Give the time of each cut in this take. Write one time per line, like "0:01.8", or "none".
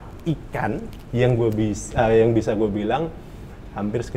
none